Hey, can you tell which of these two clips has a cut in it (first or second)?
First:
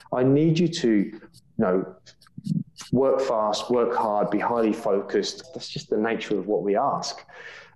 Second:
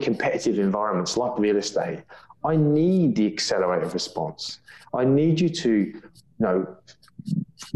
first